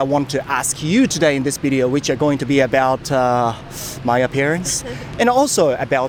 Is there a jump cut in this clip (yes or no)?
no